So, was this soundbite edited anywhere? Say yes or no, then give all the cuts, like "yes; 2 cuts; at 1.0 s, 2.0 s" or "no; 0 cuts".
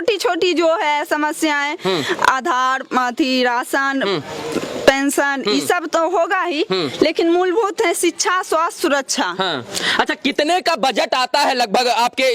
no; 0 cuts